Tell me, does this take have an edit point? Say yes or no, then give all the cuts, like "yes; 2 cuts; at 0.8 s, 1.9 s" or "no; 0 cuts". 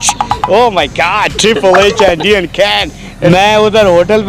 yes; 1 cut; at 3.3 s